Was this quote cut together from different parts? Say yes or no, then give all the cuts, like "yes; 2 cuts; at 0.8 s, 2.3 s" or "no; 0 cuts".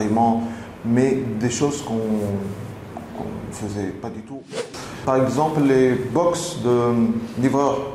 yes; 1 cut; at 4.3 s